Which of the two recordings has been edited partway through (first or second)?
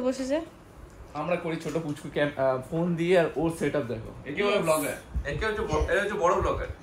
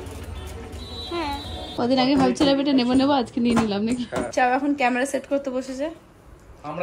second